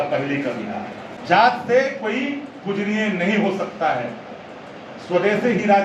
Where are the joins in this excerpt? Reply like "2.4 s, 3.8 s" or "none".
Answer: 1.1 s

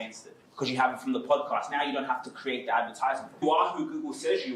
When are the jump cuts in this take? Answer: 3.3 s

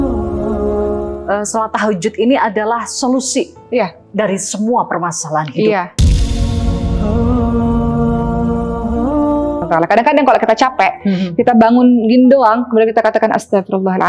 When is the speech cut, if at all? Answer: 1.2 s, 9.6 s

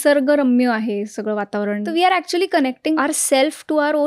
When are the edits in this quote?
1.8 s, 3.0 s

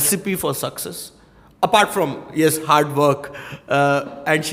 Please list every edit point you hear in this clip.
none

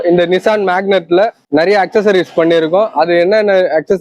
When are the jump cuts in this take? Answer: 1.4 s

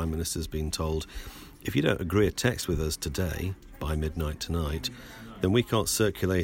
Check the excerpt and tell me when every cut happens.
none

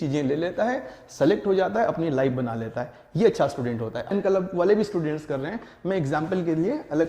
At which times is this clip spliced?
4.1 s

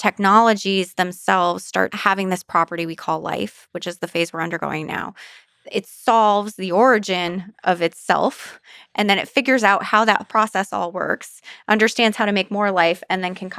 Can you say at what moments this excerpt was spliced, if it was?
2.0 s

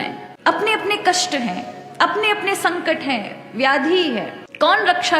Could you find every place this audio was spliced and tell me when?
none

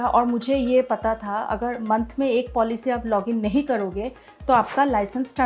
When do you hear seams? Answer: none

